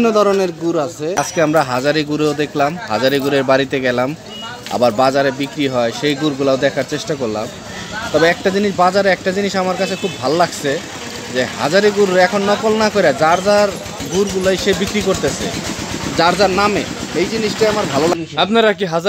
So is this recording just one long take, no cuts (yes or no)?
no